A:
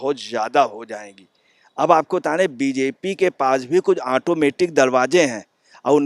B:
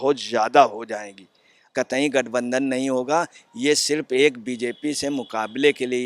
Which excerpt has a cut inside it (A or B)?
B